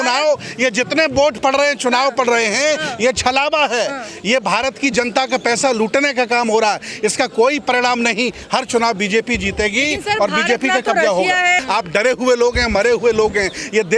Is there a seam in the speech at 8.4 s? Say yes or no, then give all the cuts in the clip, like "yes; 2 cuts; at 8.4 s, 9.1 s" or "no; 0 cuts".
no; 1 cut; at 11.6 s